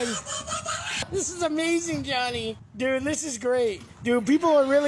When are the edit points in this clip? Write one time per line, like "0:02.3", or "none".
0:01.1
0:02.6
0:03.9